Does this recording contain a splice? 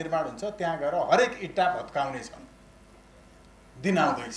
no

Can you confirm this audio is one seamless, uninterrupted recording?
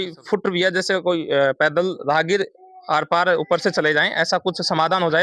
yes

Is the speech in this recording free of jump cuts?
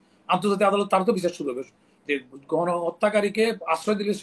yes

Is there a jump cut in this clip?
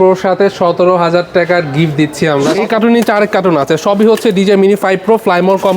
yes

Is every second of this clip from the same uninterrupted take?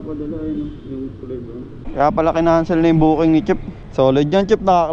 no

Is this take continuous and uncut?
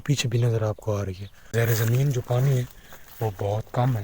no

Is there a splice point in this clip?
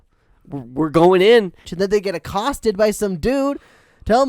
yes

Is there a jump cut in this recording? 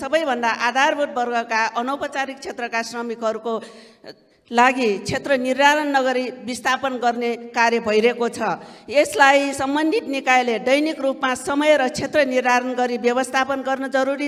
no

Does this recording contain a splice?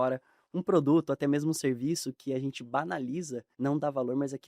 yes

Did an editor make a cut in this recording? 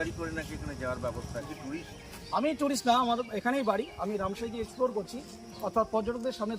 yes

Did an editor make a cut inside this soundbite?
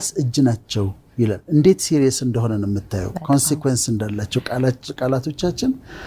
no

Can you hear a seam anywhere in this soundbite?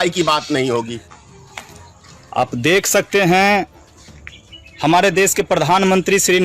yes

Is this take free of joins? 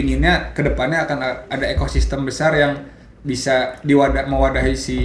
yes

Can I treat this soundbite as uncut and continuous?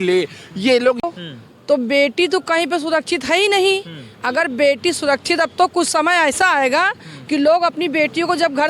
no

